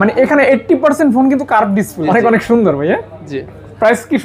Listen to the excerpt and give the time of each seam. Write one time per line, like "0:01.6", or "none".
0:02.0